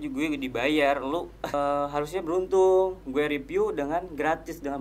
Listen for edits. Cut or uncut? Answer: cut